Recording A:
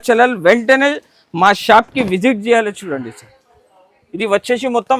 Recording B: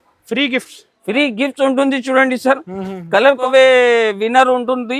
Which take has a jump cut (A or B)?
B